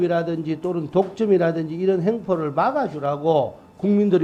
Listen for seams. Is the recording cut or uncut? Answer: uncut